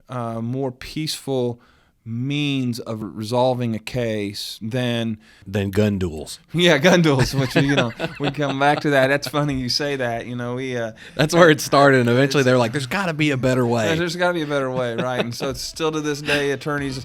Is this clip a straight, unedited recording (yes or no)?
no